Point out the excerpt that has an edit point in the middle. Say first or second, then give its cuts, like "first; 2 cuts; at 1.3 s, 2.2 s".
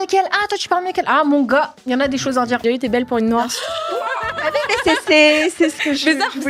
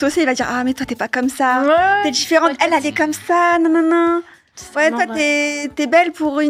first; 1 cut; at 2.6 s